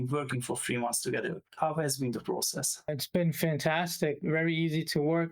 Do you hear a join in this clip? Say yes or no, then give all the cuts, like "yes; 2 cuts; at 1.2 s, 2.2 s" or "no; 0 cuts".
yes; 3 cuts; at 1.4 s, 2.9 s, 4.2 s